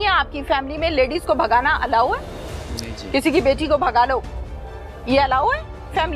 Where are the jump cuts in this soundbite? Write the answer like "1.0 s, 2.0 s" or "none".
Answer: none